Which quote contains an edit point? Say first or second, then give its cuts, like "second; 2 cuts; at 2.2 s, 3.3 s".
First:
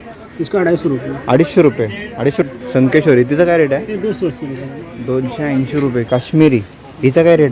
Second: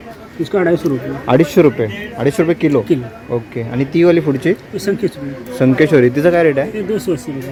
first; 2 cuts; at 2.5 s, 6.0 s